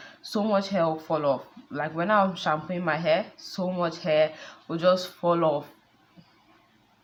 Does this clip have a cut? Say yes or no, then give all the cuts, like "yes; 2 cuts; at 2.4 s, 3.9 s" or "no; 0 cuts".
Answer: no; 0 cuts